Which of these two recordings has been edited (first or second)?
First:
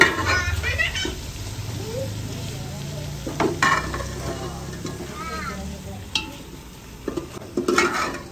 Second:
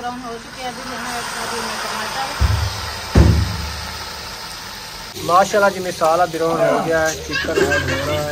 second